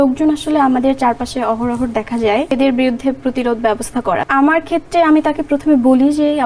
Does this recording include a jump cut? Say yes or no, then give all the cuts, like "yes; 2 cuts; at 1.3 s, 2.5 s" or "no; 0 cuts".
yes; 2 cuts; at 2.5 s, 4.2 s